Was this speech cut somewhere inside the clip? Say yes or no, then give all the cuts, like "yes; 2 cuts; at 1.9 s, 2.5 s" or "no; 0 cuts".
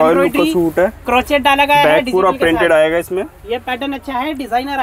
no; 0 cuts